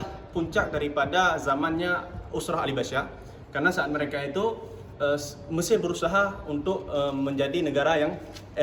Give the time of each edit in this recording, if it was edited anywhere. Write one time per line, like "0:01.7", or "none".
none